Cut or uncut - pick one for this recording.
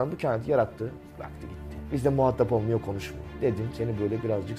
uncut